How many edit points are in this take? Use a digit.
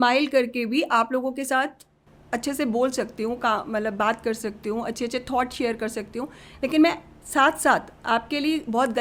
0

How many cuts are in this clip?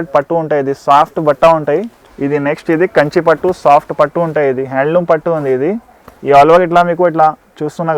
1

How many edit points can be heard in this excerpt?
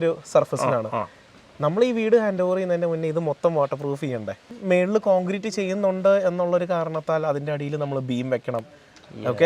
1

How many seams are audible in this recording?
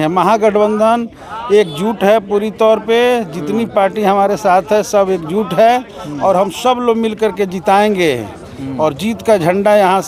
0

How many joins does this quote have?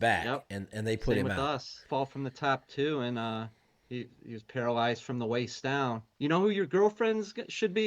2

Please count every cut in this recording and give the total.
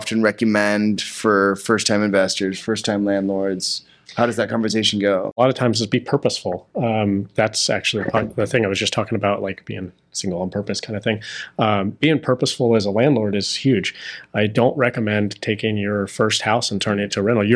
1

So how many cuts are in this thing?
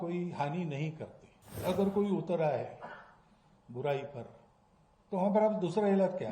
1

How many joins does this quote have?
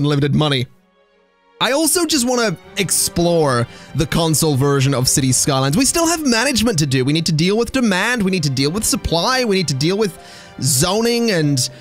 0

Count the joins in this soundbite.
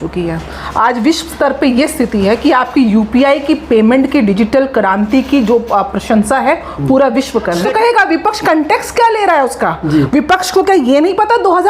1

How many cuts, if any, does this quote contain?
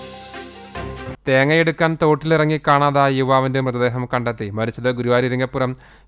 1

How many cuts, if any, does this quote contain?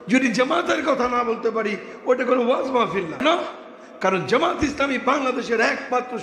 1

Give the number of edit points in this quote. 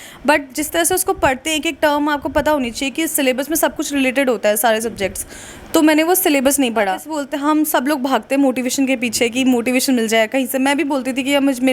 1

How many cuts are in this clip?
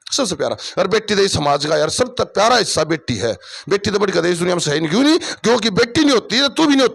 0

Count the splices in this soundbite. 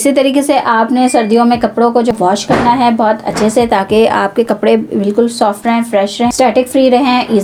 0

